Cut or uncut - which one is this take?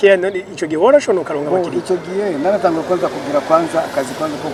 uncut